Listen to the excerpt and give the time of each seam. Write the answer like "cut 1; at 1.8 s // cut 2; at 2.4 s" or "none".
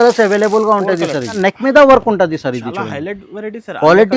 cut 1; at 1.4 s